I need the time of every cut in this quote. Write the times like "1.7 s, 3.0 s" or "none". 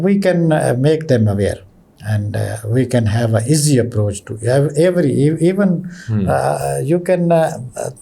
none